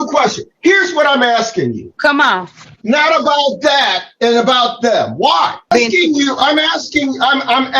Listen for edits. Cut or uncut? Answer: cut